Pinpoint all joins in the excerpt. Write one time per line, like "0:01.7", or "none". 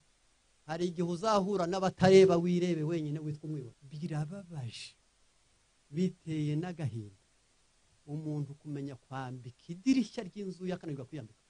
0:03.8